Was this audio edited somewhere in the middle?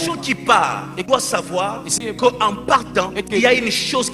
yes; 3 cuts; at 1.0 s, 1.9 s, 3.2 s

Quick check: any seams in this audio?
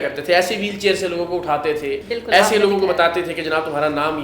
yes; 1 cut; at 2.1 s

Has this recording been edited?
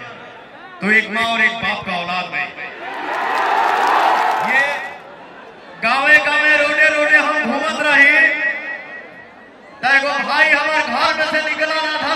yes; 1 cut; at 4.8 s

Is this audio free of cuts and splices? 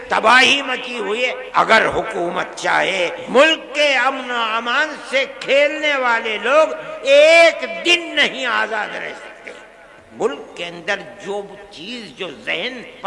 no; 3 cuts; at 1.4 s, 3.2 s, 10.1 s

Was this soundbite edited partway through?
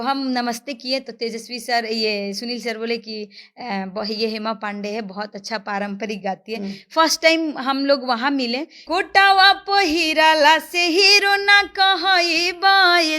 yes; 1 cut; at 8.8 s

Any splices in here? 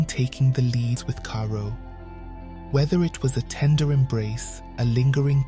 yes; 1 cut; at 1.0 s

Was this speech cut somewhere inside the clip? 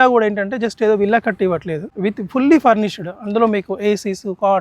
yes; 1 cut; at 1.8 s

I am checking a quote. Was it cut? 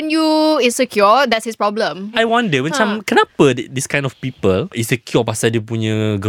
yes; 2 cuts; at 2.1 s, 4.8 s

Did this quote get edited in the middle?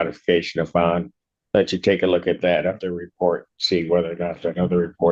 no; 0 cuts

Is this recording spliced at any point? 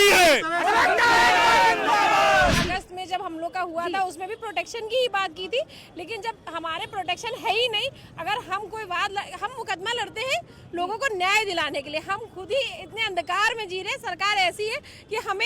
yes; 1 cut; at 2.6 s

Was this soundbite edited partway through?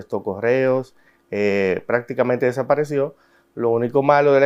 no; 0 cuts

